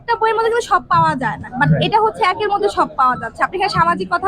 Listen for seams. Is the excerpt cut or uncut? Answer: uncut